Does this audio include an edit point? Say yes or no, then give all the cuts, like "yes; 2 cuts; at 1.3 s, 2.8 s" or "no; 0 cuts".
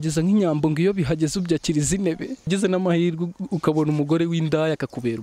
yes; 1 cut; at 2.5 s